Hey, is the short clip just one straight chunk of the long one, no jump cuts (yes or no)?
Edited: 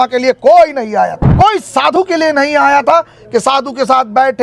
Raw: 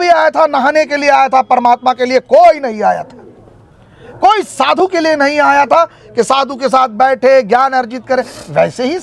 no